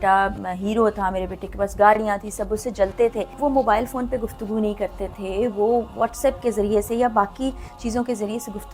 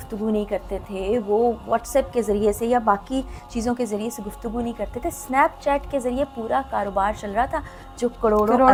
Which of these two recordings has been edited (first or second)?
first